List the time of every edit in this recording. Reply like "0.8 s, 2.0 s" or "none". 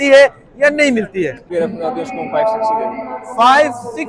1.4 s